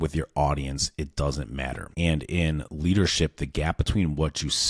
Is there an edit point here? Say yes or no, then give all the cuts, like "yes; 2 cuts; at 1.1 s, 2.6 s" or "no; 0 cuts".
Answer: yes; 1 cut; at 1.9 s